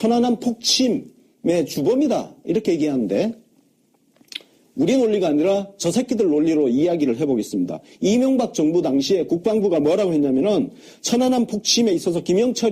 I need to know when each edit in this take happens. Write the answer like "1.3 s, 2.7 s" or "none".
9.7 s